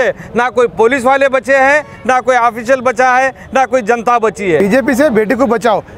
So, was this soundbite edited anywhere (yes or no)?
yes